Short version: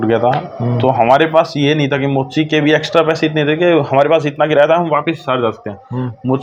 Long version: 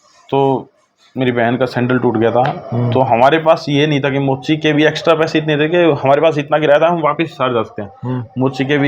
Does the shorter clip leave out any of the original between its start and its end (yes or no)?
no